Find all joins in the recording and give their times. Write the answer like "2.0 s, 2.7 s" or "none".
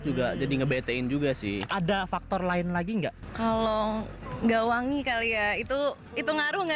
1.6 s, 3.2 s